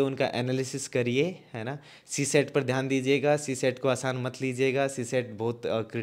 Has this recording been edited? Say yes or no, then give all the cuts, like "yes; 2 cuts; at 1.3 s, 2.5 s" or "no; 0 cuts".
no; 0 cuts